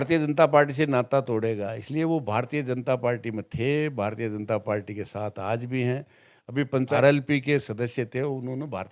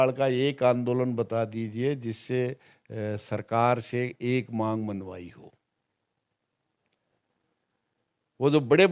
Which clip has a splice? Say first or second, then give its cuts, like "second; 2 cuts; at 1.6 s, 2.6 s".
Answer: first; 1 cut; at 6.9 s